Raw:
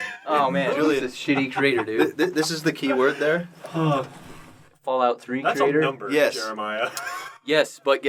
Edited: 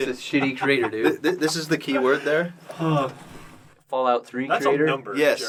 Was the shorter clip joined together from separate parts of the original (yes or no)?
no